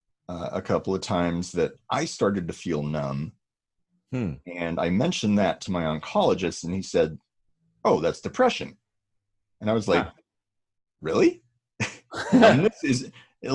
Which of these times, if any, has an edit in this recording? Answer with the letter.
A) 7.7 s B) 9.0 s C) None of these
C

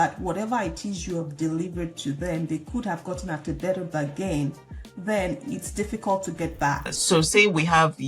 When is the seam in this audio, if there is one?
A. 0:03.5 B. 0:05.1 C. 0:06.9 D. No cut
C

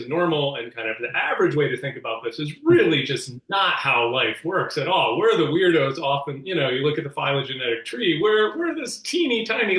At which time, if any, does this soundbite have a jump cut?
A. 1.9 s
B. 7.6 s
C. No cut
C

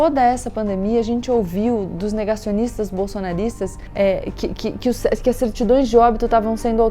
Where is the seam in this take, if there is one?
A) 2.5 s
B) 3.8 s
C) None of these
B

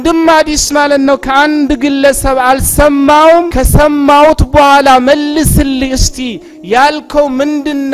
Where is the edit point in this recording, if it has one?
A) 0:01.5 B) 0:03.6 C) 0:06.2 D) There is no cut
B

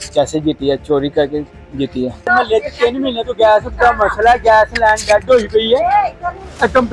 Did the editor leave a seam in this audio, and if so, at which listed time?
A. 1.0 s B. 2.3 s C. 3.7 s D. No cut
B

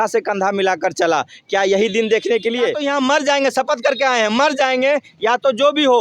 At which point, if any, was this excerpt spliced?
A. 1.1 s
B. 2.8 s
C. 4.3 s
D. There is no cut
B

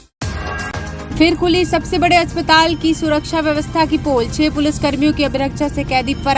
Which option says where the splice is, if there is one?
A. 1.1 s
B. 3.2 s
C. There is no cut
A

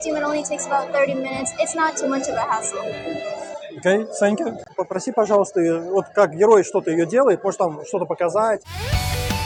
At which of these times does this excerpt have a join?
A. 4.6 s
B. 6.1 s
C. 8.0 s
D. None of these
D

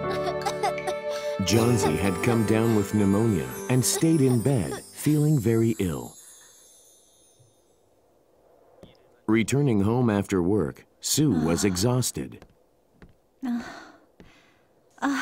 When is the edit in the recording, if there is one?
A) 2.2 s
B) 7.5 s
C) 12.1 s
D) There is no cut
C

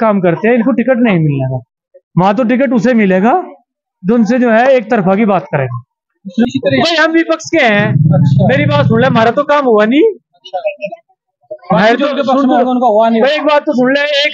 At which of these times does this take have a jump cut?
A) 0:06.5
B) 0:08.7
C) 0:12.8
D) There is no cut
A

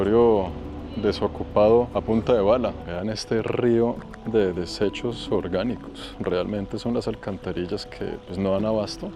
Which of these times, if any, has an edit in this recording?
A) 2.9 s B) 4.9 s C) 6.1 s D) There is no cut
A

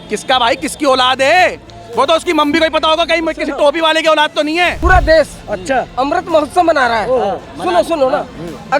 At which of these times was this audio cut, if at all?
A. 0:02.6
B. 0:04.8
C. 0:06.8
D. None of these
B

